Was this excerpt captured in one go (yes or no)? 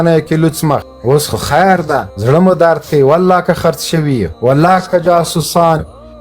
no